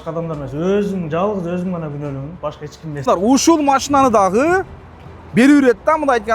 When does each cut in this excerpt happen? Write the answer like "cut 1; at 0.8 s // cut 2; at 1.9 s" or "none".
cut 1; at 3.1 s